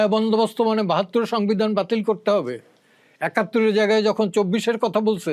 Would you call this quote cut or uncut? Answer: uncut